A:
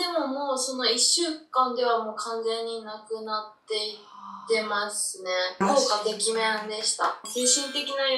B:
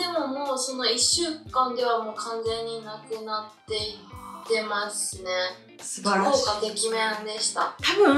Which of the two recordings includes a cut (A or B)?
A